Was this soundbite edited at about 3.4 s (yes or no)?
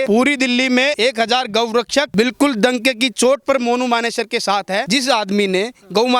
no